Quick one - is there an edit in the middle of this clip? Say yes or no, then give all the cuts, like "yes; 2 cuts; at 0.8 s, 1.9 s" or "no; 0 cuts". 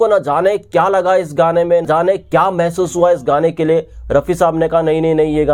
no; 0 cuts